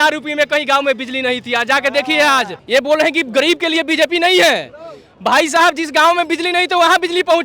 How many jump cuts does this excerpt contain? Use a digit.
1